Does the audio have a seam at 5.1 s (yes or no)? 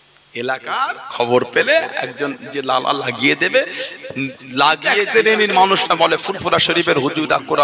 yes